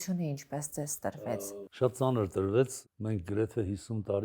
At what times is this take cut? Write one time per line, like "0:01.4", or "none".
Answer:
0:01.1
0:02.8